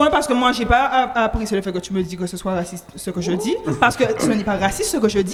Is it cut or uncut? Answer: uncut